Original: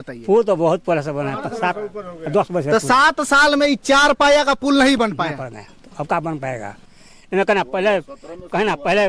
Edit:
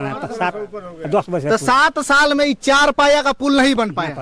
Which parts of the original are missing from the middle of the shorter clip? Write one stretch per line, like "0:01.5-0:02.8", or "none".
none